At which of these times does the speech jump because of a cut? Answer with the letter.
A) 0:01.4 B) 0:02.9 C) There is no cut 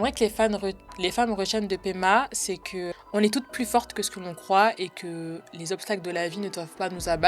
B